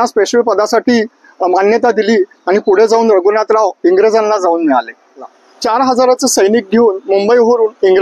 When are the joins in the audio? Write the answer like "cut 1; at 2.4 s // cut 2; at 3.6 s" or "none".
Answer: cut 1; at 5.4 s